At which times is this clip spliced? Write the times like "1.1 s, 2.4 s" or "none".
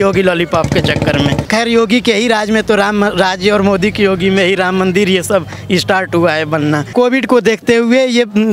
1.5 s, 6.9 s